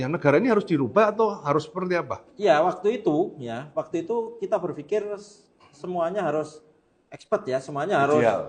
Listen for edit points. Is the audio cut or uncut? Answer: uncut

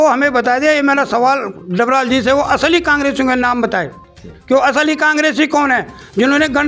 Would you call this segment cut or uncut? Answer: uncut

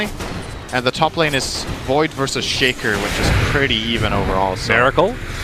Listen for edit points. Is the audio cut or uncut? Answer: uncut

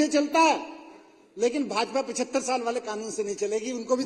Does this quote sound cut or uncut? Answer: uncut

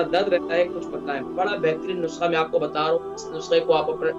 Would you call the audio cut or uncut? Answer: cut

